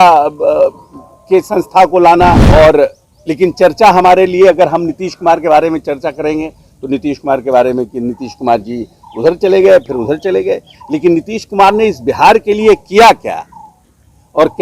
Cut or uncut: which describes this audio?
cut